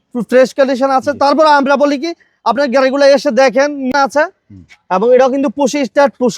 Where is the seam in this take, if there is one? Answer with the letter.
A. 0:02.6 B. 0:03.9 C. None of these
B